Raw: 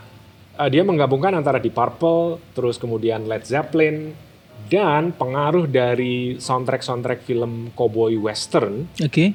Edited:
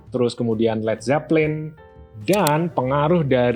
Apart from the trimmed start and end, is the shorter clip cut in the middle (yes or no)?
no